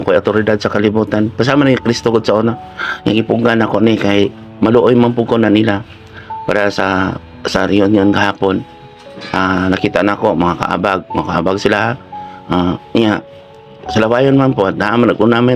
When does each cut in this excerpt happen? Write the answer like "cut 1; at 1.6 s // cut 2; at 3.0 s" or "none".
none